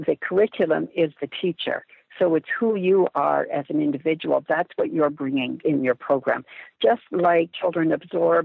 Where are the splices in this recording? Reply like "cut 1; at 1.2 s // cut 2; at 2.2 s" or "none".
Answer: cut 1; at 5.6 s // cut 2; at 7.5 s